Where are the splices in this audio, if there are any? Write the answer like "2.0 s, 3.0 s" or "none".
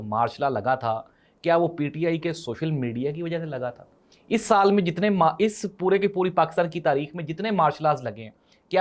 none